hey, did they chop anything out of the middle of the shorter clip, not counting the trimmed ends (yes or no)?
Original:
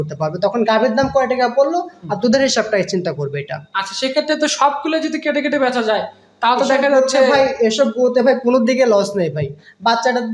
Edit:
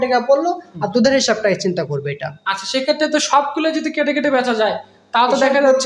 no